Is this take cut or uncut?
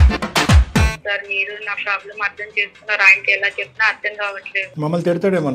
cut